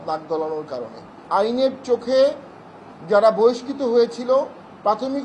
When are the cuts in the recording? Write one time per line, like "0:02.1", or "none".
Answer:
0:01.2